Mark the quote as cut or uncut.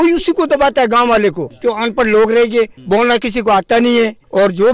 cut